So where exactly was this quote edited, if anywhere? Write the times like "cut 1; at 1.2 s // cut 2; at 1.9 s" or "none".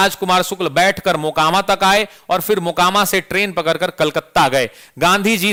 none